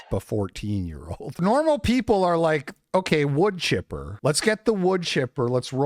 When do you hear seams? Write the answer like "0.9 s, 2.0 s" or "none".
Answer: 1.4 s